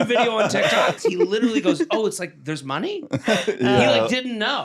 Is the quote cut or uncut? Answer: cut